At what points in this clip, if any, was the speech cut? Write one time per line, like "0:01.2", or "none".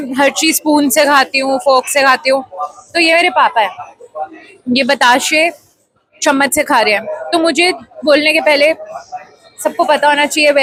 none